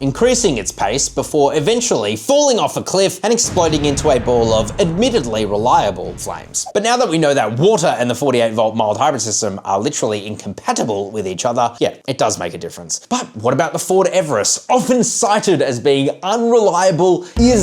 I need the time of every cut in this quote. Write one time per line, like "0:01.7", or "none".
0:06.6
0:12.9